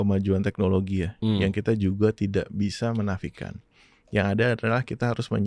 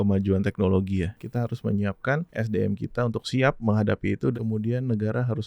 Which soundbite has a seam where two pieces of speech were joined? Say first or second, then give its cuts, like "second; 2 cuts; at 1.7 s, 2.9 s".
second; 3 cuts; at 1.2 s, 2.3 s, 4.3 s